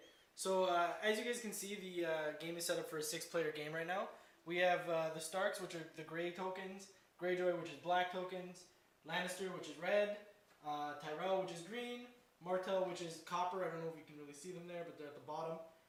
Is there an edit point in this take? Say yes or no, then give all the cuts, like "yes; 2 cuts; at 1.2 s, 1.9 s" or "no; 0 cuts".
no; 0 cuts